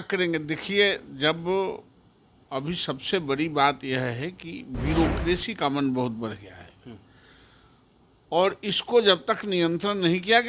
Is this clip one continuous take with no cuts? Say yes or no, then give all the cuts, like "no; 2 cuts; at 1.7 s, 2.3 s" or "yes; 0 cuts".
yes; 0 cuts